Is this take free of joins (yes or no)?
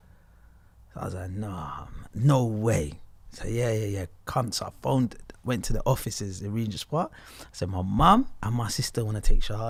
yes